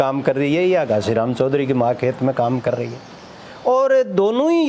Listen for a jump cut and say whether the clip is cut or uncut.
uncut